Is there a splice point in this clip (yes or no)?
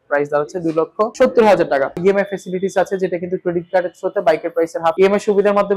yes